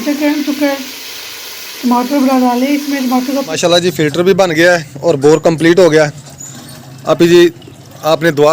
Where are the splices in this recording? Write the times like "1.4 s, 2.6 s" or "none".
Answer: 3.5 s